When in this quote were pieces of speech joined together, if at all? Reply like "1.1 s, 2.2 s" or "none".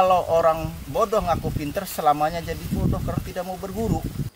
none